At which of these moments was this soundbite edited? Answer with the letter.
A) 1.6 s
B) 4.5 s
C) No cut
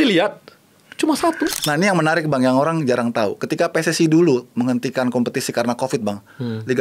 A